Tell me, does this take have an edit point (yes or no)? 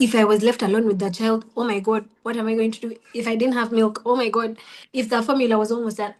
no